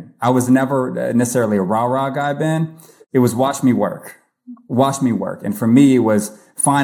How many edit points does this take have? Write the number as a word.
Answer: one